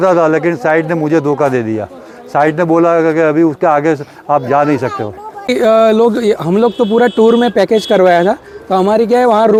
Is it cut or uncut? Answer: uncut